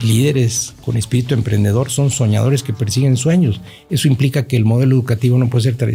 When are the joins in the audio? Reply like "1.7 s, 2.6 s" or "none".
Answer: none